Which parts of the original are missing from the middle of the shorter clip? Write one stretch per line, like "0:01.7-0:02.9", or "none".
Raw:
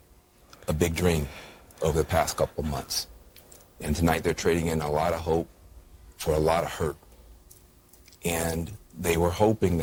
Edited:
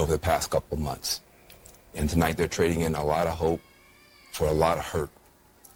none